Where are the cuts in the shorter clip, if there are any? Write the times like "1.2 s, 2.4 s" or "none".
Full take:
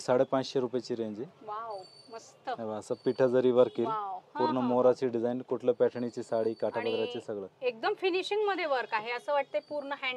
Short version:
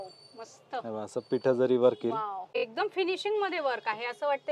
2.6 s